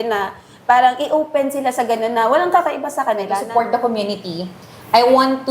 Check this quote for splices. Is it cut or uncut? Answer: cut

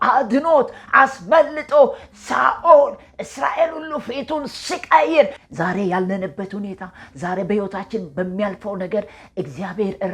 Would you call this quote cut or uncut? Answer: cut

